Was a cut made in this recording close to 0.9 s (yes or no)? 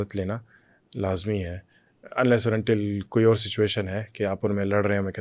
no